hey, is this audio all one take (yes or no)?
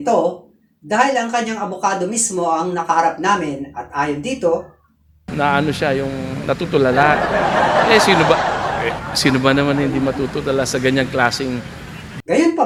yes